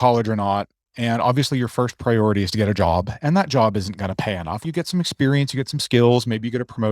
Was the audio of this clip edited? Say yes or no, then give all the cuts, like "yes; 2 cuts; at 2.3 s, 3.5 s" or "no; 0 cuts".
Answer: yes; 1 cut; at 4.5 s